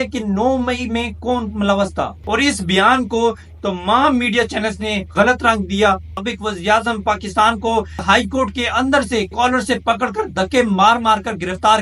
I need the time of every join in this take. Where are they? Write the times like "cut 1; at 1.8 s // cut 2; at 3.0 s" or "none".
cut 1; at 2.2 s // cut 2; at 6.2 s // cut 3; at 8.0 s